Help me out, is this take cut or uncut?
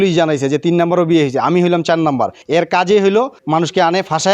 cut